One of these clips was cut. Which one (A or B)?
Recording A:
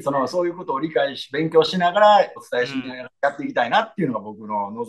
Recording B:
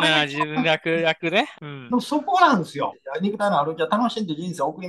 B